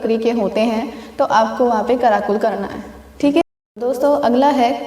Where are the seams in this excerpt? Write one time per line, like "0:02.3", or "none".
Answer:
0:03.4